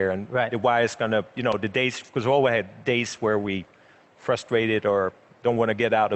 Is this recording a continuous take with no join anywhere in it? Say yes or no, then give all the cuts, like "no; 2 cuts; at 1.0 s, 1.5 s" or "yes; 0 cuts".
yes; 0 cuts